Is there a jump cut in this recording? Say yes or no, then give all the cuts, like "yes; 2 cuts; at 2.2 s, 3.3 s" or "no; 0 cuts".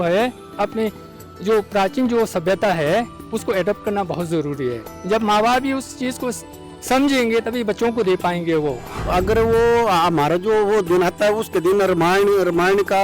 yes; 1 cut; at 9.1 s